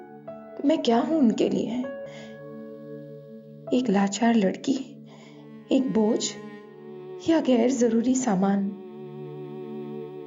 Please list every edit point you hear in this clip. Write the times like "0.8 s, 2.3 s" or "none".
2.1 s